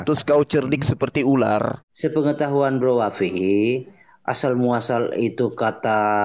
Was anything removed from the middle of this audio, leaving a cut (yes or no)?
yes